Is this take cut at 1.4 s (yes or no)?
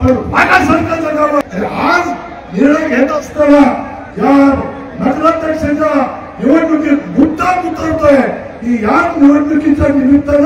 yes